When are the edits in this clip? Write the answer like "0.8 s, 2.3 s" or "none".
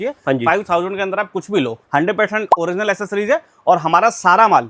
1.8 s